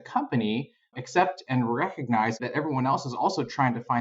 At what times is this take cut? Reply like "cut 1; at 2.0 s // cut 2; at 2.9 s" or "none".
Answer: cut 1; at 2.4 s